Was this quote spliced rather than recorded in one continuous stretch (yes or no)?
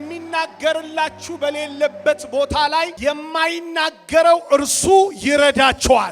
yes